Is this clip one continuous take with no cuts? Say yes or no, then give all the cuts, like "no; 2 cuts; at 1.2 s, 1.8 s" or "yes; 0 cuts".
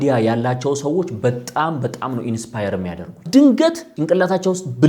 no; 2 cuts; at 3.2 s, 3.9 s